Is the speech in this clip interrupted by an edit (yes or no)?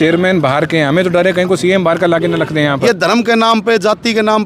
yes